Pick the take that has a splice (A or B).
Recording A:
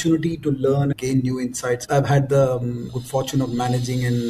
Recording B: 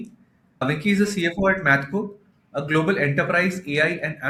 A